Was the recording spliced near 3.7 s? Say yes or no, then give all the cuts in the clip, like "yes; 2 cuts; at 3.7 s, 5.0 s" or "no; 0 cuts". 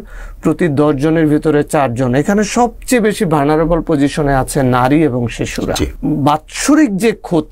no; 1 cut; at 5.9 s